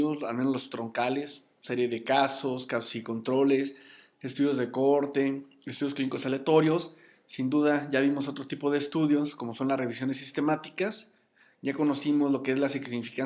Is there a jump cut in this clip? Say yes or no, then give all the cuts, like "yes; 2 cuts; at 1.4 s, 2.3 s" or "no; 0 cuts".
no; 0 cuts